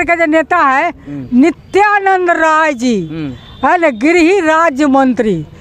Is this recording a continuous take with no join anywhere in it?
yes; 0 cuts

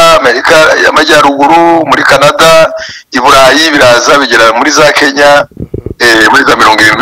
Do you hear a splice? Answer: no; 0 cuts

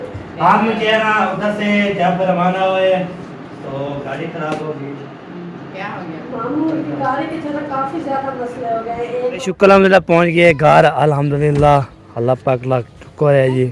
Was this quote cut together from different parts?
yes; 2 cuts; at 5.5 s, 9.4 s

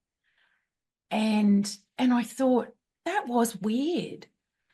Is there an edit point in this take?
no; 0 cuts

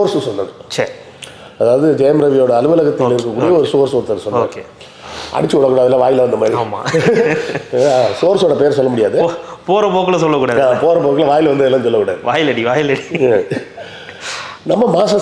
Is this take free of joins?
yes; 0 cuts

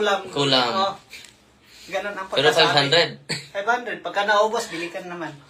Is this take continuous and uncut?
yes; 0 cuts

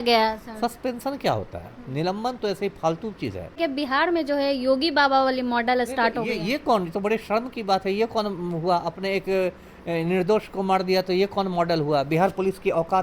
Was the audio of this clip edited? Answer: yes; 1 cut; at 3.6 s

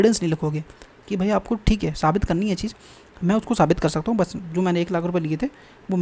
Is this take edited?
no; 0 cuts

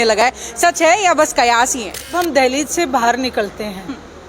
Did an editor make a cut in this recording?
yes; 1 cut; at 2.1 s

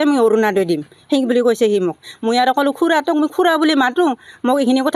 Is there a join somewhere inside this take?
no; 0 cuts

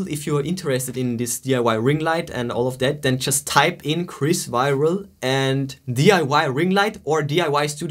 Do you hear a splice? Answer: no; 0 cuts

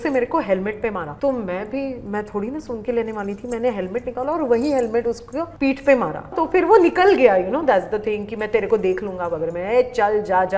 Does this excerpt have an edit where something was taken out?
no; 0 cuts

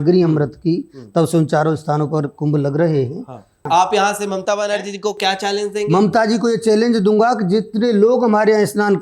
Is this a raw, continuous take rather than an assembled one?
no; 1 cut; at 3.7 s

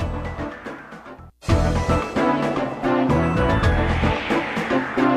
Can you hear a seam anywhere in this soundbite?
yes; 2 cuts; at 1.3 s, 2.8 s

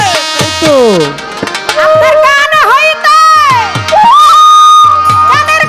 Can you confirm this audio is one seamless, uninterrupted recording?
yes; 0 cuts

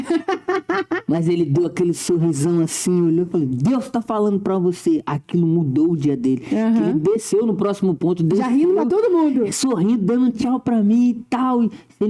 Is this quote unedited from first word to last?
yes; 0 cuts

